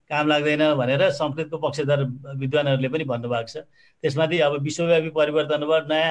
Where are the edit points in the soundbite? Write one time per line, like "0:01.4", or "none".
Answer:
none